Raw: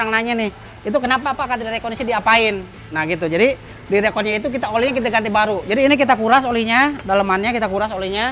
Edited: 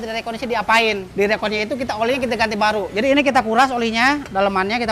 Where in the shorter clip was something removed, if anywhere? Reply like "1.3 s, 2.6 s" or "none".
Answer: 1.1 s